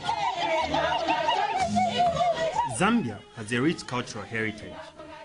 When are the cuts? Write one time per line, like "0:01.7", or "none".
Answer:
0:01.2